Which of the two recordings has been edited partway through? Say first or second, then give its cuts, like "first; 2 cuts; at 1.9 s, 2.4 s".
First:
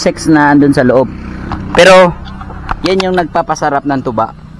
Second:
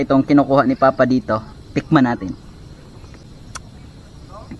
second; 1 cut; at 3.2 s